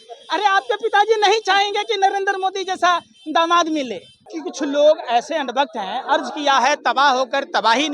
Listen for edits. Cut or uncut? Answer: cut